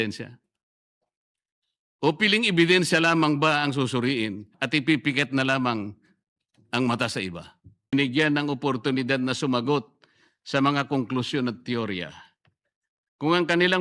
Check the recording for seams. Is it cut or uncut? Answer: cut